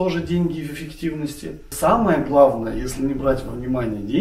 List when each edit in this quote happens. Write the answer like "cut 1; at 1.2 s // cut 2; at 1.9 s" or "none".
cut 1; at 1.6 s